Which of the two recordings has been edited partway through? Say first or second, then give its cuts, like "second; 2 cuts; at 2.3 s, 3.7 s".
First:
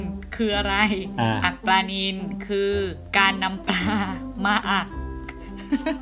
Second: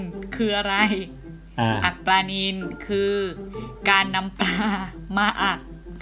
first; 2 cuts; at 1.1 s, 3.0 s